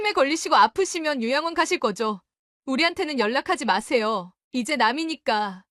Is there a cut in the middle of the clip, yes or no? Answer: no